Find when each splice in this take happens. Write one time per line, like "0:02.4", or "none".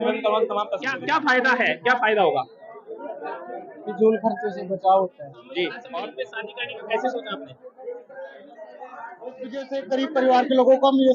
0:00.9
0:05.8
0:09.7